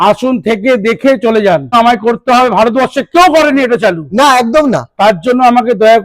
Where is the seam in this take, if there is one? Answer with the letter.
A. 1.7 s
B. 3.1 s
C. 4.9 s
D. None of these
A